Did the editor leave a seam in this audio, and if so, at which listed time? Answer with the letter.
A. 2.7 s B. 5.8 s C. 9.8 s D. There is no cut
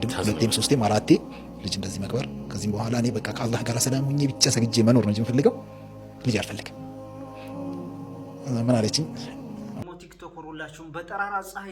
C